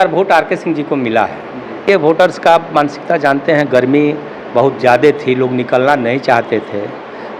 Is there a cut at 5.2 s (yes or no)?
no